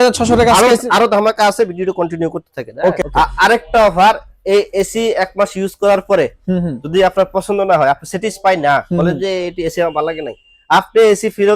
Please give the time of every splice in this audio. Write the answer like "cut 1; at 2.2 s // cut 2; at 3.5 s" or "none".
cut 1; at 3.0 s